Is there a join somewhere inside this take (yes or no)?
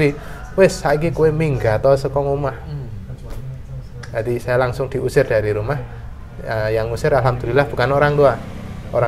no